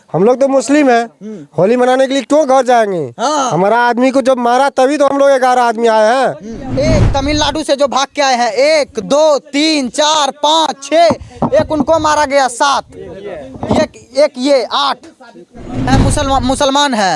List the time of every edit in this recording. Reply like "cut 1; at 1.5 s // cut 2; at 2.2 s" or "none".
cut 1; at 6.7 s // cut 2; at 15.8 s